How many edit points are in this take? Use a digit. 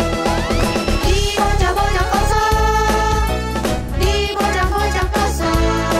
0